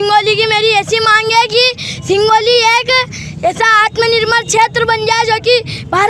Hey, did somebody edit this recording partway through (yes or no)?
no